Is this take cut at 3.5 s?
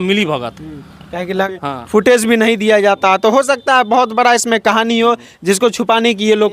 no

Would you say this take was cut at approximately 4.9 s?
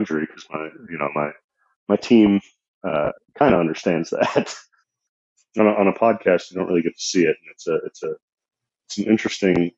yes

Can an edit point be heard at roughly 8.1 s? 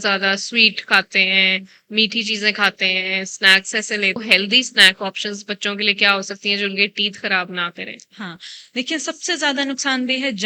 no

